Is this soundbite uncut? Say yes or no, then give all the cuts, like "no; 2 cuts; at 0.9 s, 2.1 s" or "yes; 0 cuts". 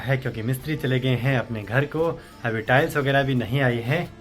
yes; 0 cuts